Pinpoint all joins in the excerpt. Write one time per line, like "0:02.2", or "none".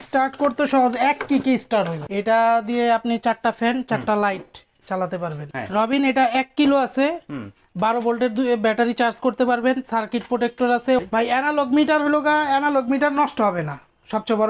0:02.0
0:05.4
0:11.0